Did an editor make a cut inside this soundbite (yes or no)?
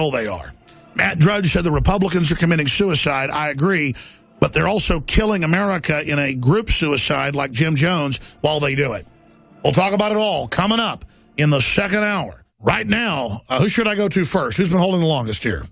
no